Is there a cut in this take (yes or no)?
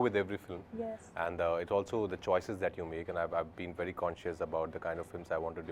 no